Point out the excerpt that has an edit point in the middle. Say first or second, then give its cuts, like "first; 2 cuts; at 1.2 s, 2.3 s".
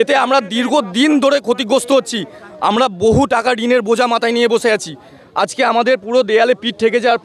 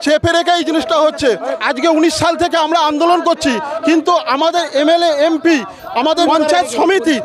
second; 2 cuts; at 1.4 s, 6.2 s